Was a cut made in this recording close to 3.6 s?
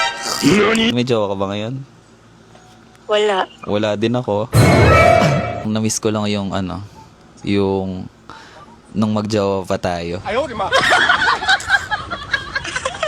no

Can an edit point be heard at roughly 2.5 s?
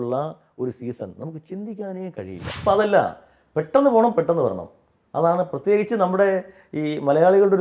yes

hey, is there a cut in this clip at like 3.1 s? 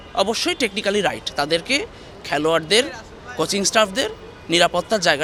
no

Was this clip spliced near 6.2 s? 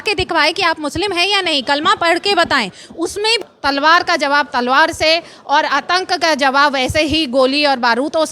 no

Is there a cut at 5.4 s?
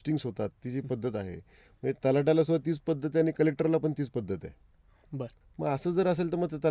yes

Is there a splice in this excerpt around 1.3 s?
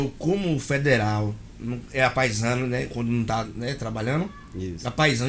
no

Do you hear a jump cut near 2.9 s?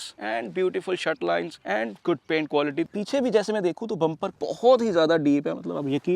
yes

